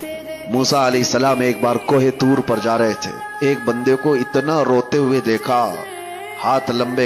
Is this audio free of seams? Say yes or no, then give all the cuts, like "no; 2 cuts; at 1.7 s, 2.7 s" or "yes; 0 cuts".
no; 1 cut; at 1.2 s